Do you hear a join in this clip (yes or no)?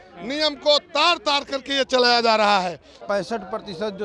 yes